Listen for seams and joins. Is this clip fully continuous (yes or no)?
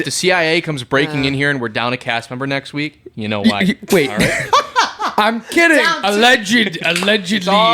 yes